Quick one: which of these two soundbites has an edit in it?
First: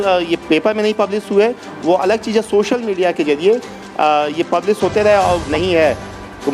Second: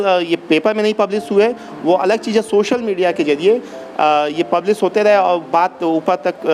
first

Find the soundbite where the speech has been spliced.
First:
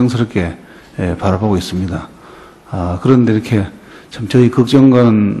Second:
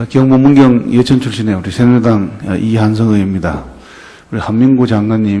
first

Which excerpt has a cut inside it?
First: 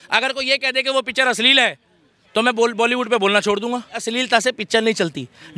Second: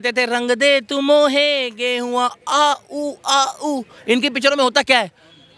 first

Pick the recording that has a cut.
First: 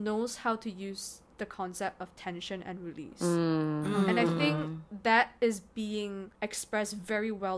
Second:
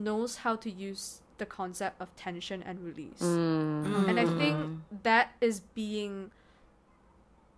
first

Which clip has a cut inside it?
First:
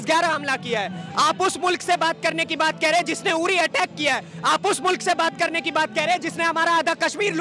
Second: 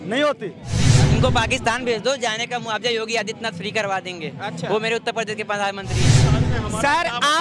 second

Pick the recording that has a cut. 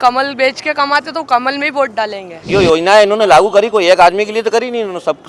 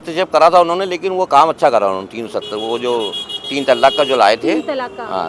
first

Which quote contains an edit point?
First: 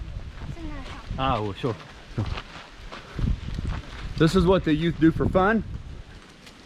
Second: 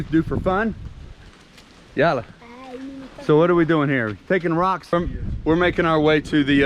second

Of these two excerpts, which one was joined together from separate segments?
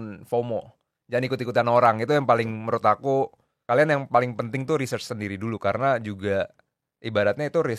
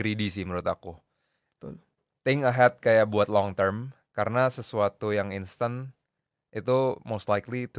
first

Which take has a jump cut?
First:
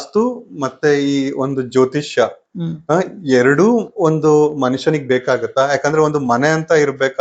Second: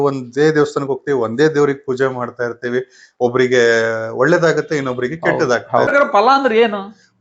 second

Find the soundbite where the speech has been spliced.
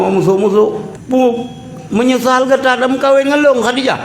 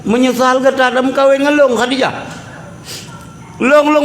first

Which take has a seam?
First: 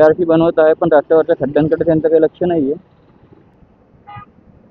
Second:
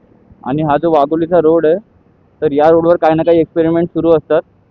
first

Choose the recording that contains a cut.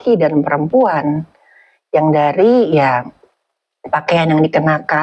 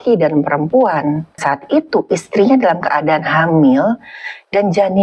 second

